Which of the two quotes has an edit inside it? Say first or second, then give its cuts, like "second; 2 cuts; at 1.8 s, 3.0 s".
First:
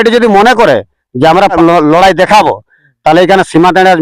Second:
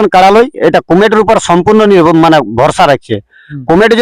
first; 1 cut; at 1.5 s